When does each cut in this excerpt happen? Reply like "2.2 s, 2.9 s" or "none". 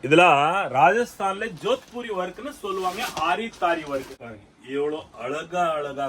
4.2 s